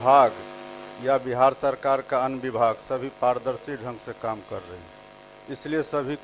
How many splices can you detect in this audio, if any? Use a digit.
0